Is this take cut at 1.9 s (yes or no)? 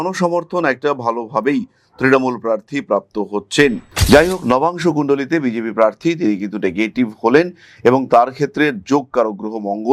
no